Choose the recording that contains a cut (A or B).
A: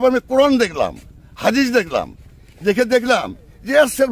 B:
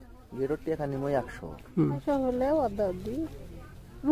B